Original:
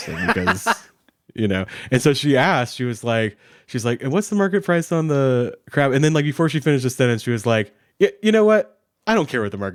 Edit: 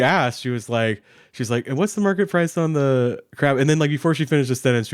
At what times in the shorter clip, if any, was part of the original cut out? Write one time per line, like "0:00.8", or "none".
none

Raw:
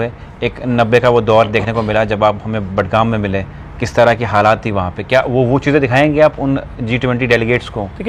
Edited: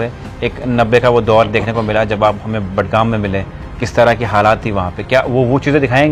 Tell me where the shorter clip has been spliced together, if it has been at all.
none

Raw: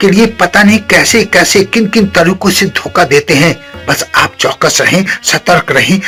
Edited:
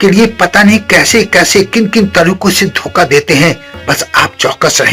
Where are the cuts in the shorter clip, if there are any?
none

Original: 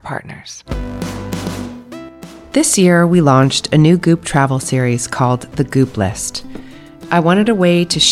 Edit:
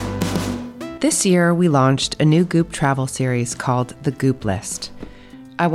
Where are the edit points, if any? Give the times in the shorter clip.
0:00.9

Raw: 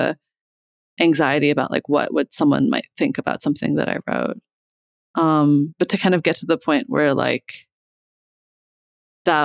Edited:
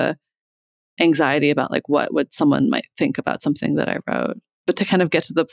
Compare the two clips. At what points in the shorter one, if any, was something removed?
0:04.6

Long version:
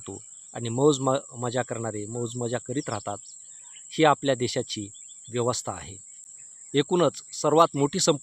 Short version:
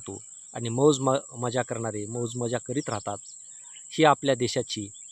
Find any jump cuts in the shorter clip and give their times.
none

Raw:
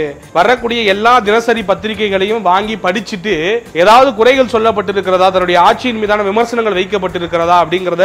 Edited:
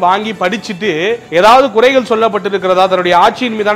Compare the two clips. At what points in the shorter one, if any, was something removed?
none

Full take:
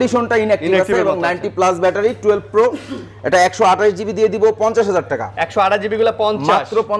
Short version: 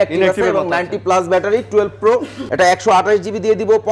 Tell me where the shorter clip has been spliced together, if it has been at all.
0:02.4

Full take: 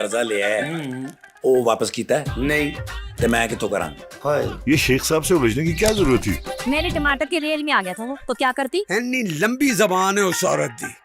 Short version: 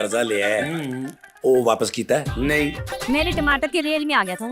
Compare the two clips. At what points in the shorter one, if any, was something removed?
0:02.9

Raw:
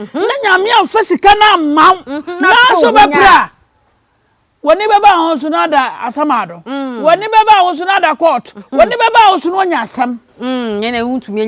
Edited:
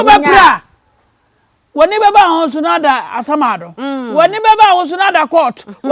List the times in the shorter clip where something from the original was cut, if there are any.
none

